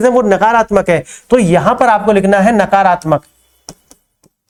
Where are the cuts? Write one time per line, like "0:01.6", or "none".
none